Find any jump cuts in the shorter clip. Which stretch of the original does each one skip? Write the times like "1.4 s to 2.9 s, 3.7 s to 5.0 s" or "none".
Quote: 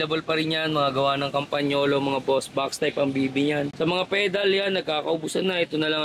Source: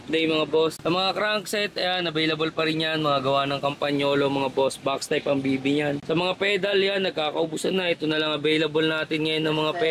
none